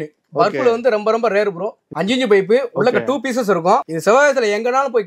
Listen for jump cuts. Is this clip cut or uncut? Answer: cut